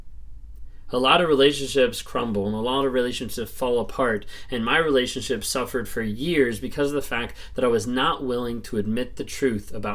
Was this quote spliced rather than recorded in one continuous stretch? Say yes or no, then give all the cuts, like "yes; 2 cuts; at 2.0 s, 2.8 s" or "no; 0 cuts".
no; 0 cuts